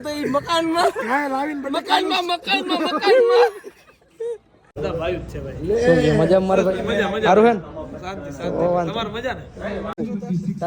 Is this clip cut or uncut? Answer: cut